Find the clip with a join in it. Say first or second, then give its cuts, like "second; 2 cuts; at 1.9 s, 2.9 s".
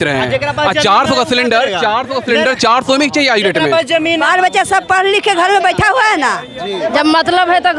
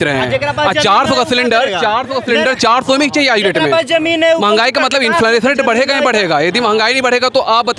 first; 2 cuts; at 4.2 s, 6.9 s